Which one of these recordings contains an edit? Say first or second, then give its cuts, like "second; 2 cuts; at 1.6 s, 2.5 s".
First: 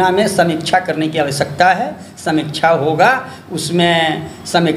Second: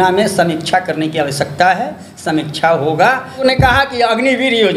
second; 1 cut; at 3.4 s